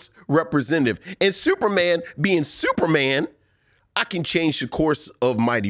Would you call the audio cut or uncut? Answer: uncut